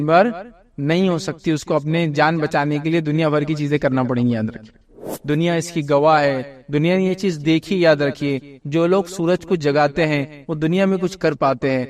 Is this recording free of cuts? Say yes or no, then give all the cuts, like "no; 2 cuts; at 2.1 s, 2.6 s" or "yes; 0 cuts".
no; 1 cut; at 4.9 s